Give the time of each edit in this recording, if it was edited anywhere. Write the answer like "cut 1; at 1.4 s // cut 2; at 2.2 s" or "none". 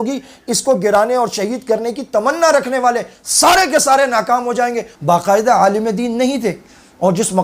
cut 1; at 4.9 s